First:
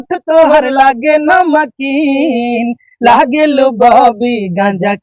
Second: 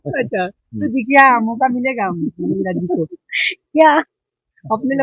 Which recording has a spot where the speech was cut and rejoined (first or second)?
second